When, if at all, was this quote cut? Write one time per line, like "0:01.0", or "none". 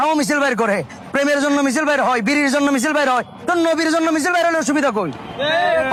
none